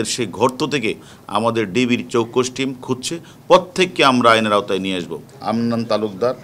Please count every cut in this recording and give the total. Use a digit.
1